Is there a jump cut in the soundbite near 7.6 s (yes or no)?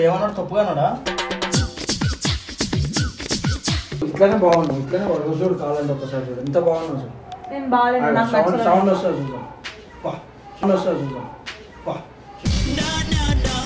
no